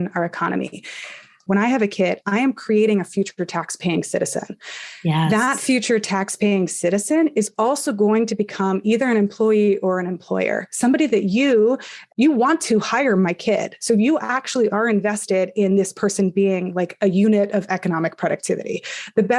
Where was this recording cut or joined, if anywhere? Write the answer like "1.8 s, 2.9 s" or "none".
1.4 s, 12.0 s